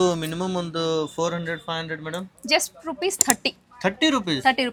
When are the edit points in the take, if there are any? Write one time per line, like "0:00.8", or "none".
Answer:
none